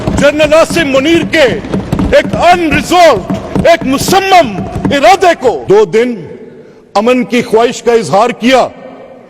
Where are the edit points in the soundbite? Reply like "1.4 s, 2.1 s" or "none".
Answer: 5.6 s